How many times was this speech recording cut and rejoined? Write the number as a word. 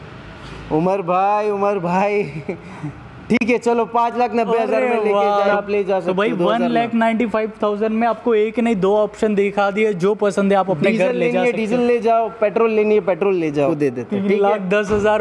two